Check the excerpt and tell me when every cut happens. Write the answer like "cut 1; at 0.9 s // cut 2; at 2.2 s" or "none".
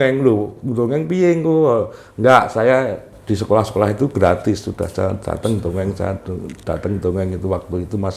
none